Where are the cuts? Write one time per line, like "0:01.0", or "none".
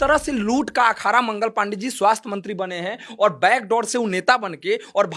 none